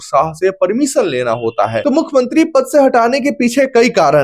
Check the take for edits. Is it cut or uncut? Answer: cut